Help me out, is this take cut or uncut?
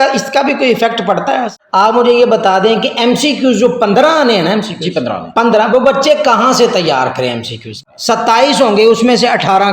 cut